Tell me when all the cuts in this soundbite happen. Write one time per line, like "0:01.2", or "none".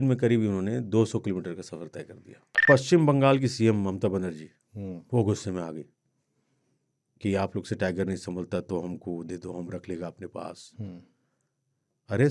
0:02.5